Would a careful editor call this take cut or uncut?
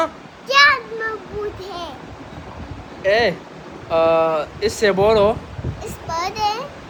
uncut